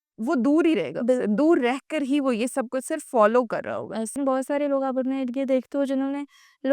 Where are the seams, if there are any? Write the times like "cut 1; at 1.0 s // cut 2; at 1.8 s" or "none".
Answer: cut 1; at 4.1 s